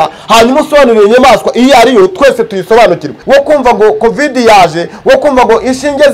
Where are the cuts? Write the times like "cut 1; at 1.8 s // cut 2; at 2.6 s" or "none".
cut 1; at 3.1 s